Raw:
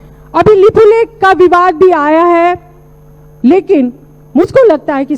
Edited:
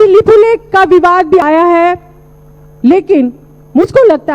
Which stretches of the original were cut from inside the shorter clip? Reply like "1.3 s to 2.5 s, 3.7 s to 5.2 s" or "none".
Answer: 1.9 s to 2.0 s